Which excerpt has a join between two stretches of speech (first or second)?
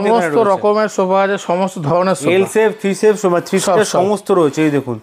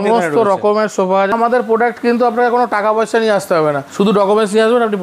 second